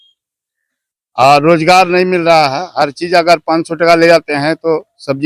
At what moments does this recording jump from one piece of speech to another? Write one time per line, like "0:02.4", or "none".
none